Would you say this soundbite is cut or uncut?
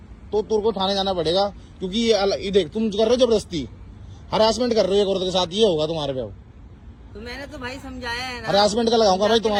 uncut